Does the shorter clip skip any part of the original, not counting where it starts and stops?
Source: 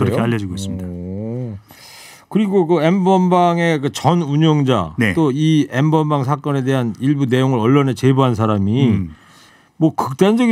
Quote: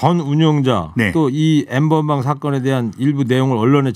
no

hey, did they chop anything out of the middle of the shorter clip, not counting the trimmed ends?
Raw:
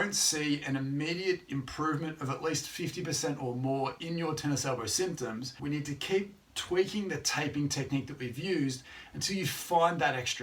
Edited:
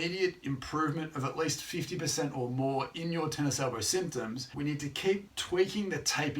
yes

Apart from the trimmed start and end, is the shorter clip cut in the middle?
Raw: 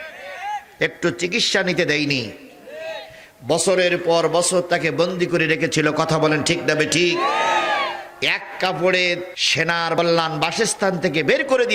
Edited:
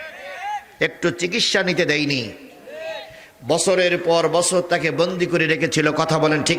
no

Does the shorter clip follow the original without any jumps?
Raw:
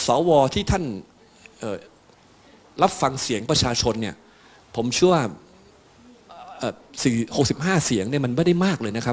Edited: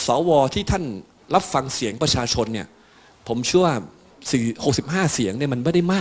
no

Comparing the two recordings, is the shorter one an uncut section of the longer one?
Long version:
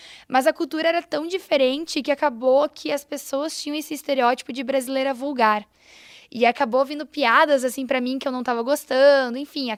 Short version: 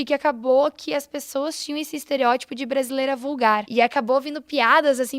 no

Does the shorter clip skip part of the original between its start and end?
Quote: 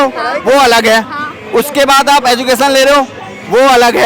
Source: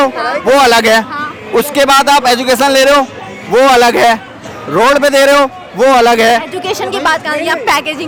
no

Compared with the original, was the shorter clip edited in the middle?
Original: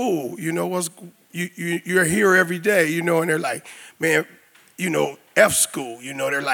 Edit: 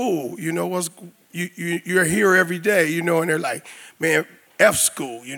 yes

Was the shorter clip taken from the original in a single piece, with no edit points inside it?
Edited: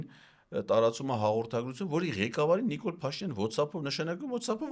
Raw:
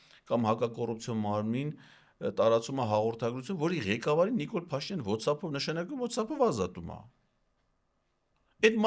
yes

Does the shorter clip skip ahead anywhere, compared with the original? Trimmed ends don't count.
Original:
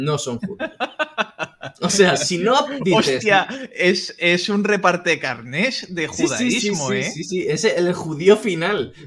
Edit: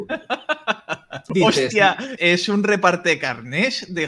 yes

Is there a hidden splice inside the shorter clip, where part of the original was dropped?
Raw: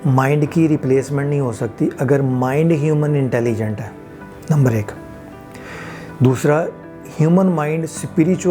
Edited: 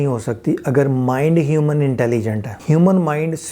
yes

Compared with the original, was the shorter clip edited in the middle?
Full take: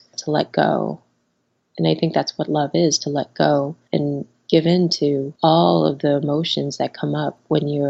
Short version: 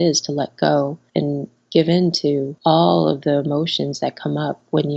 no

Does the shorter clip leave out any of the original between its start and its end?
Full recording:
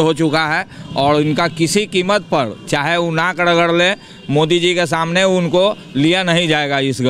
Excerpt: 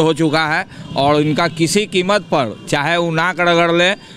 no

